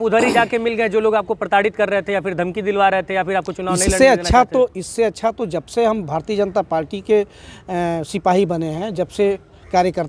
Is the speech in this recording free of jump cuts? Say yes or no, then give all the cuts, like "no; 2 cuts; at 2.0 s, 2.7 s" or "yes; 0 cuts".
yes; 0 cuts